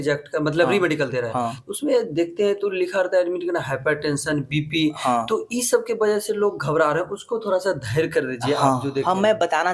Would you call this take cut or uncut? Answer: uncut